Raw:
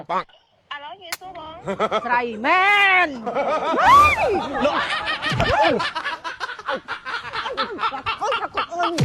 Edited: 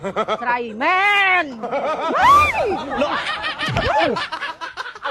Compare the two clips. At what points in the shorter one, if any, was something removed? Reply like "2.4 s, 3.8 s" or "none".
none